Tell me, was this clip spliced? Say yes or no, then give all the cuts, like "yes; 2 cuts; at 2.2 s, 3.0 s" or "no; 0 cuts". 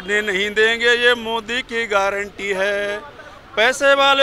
no; 0 cuts